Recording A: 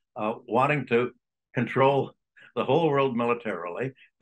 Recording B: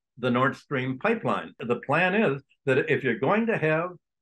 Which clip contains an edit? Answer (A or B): B